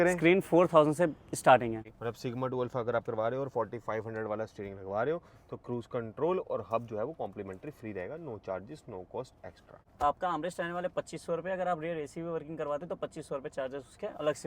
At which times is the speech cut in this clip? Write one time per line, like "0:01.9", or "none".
0:01.9
0:09.9